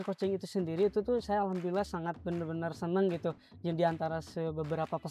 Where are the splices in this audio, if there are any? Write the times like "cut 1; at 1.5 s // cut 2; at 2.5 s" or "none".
none